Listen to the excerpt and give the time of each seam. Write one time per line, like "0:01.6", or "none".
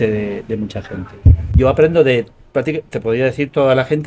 0:01.4